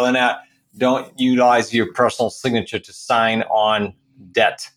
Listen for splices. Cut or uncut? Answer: uncut